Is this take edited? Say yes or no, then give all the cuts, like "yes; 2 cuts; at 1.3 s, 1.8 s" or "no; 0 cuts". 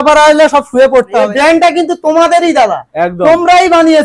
yes; 1 cut; at 1.3 s